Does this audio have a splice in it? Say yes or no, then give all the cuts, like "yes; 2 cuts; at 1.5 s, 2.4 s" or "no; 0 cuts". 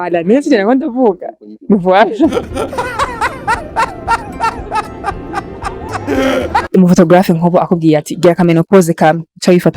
yes; 1 cut; at 6.7 s